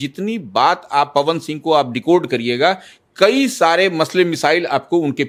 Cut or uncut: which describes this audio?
uncut